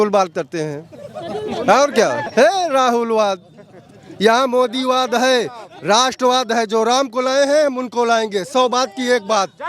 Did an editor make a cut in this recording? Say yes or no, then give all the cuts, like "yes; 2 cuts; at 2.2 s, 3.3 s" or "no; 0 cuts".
yes; 1 cut; at 2.2 s